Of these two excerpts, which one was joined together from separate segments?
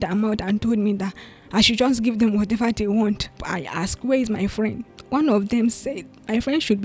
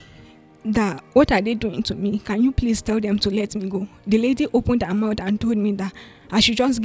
first; 2 cuts; at 3.4 s, 4.9 s

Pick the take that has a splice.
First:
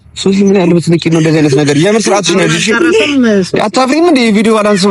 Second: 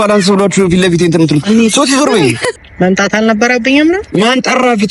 second; 1 cut; at 2.5 s

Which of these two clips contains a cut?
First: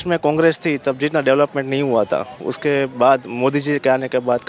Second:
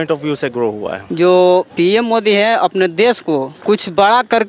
second; 3 cuts; at 1.0 s, 1.7 s, 3.5 s

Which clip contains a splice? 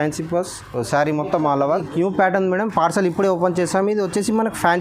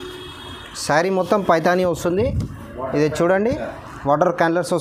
first; 1 cut; at 1.7 s

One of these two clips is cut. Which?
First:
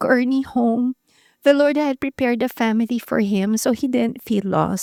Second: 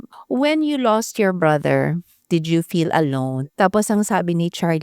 second; 2 cuts; at 2.2 s, 3.4 s

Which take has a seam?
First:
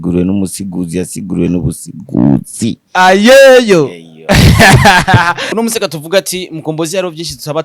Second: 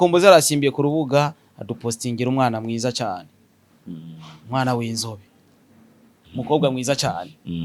first; 1 cut; at 5.5 s

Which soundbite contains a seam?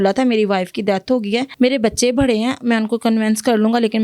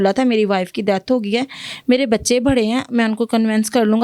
first; 1 cut; at 1.5 s

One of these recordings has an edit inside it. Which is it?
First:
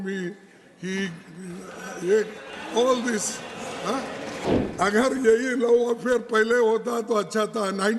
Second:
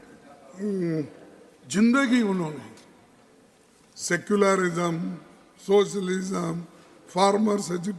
first; 1 cut; at 4.5 s

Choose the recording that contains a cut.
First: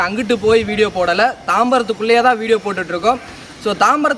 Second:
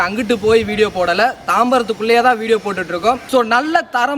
second; 1 cut; at 3.2 s

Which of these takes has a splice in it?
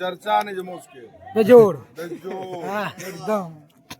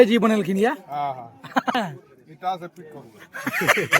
second; 1 cut; at 1.8 s

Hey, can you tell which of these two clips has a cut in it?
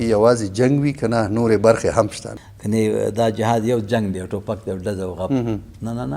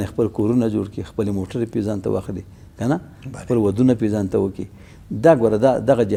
first; 1 cut; at 2.2 s

